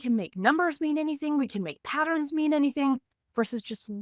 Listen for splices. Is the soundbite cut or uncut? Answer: uncut